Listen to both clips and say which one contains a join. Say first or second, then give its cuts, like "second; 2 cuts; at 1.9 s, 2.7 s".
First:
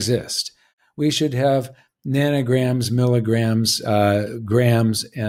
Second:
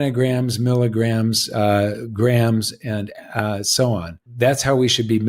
second; 1 cut; at 4.2 s